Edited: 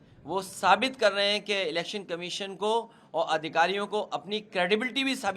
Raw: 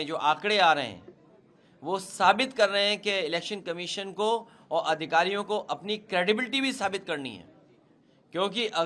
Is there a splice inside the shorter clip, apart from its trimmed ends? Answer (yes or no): no